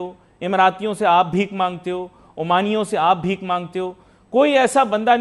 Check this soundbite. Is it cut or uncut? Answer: uncut